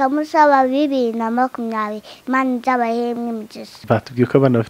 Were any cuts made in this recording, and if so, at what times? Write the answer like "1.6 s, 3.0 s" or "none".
3.7 s